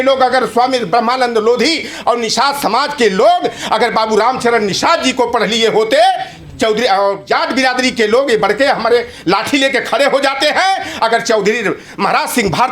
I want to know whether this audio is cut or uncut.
uncut